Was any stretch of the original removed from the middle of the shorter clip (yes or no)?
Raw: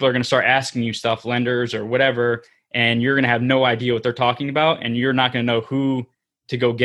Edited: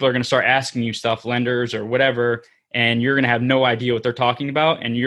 no